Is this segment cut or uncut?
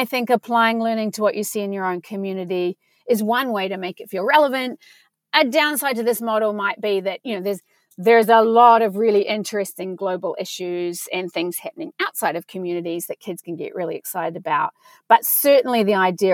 uncut